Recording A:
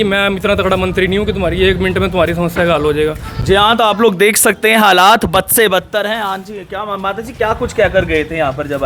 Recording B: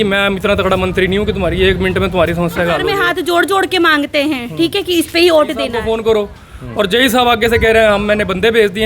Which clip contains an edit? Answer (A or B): B